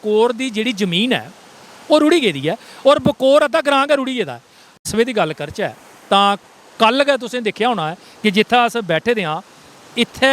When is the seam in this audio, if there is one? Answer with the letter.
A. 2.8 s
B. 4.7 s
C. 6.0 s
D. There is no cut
B